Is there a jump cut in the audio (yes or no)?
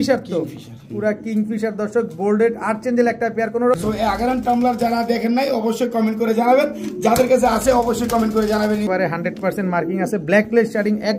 yes